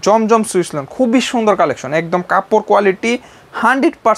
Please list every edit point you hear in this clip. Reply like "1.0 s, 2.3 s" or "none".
none